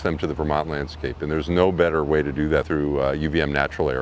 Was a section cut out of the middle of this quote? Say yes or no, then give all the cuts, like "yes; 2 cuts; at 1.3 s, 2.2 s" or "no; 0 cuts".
yes; 1 cut; at 2.7 s